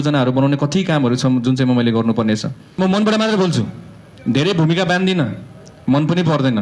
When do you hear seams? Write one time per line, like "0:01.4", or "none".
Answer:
0:02.8